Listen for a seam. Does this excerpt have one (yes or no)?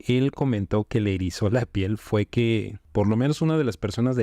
yes